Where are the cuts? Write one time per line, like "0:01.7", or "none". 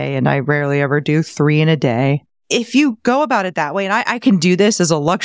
0:02.3